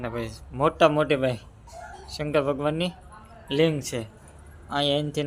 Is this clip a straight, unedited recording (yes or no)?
yes